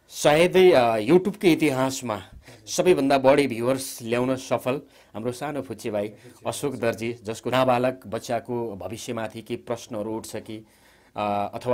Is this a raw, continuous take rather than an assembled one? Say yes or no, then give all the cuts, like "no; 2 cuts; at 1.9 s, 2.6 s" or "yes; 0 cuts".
no; 1 cut; at 7.5 s